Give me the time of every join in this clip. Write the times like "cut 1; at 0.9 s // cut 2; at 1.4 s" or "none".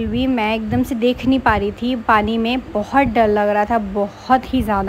none